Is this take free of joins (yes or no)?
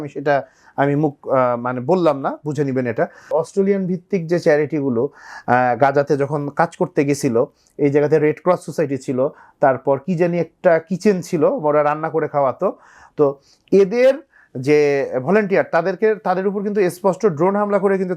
no